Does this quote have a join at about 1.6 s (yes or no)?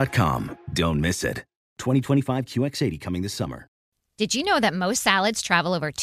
no